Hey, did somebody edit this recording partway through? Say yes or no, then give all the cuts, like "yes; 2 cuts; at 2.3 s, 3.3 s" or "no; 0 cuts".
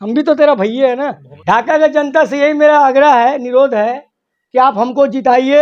yes; 1 cut; at 1.3 s